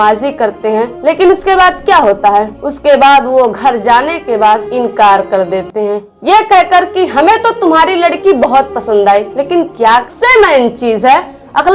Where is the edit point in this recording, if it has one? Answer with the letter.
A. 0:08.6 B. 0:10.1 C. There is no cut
B